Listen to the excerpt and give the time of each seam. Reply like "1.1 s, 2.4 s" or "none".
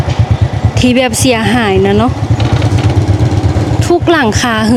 none

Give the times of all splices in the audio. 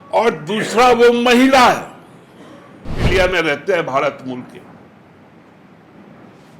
3.1 s

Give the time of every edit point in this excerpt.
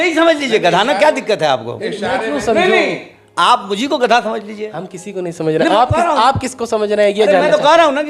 none

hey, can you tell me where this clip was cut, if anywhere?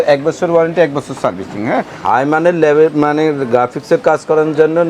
1.9 s

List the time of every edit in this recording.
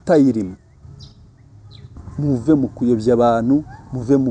2.0 s

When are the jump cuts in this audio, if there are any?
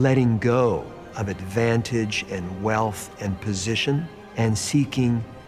4.2 s

